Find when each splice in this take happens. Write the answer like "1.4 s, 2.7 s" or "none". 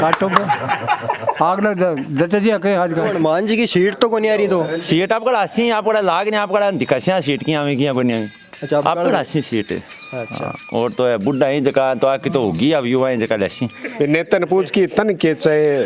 3.1 s, 13.8 s